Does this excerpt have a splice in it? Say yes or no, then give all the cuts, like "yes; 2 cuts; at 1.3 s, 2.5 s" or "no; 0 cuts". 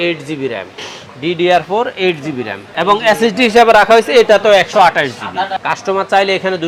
no; 0 cuts